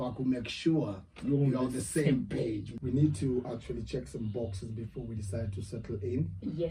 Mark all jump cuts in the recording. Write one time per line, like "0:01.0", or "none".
0:02.7